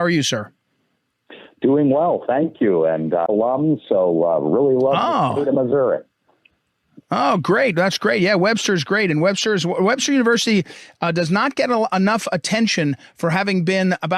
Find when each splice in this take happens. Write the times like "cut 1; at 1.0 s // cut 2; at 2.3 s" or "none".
none